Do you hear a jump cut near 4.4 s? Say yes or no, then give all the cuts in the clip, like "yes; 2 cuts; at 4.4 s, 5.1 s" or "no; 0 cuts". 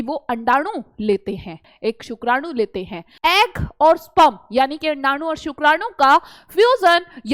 no; 2 cuts; at 1.7 s, 3.0 s